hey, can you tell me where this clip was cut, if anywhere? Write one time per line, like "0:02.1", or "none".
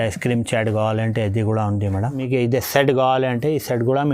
0:02.1

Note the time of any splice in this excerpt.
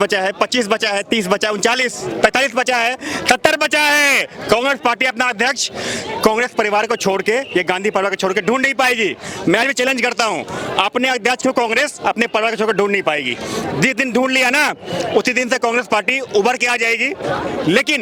none

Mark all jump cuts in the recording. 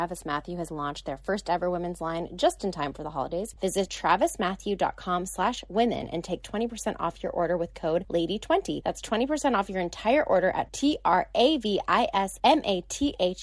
0:03.8
0:08.1
0:08.8
0:12.3

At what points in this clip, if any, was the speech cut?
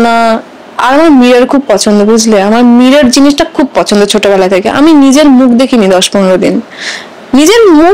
none

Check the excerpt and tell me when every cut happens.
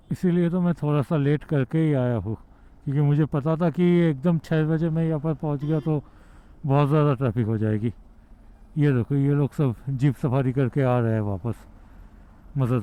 none

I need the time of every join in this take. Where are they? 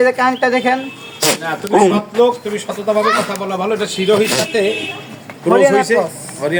none

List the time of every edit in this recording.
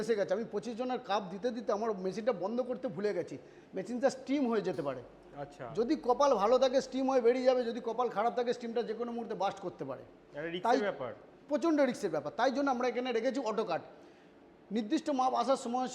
none

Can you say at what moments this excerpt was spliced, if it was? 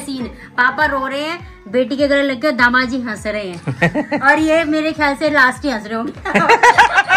none

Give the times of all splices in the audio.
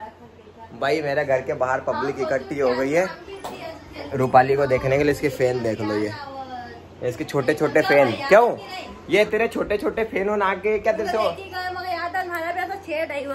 none

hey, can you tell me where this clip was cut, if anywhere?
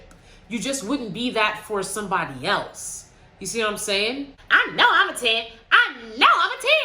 0:04.3

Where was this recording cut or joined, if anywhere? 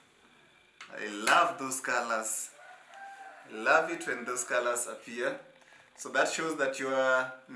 none

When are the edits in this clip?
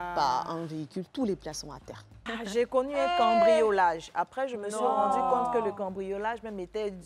0:02.1

